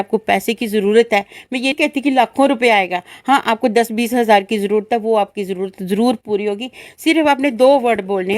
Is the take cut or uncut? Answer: cut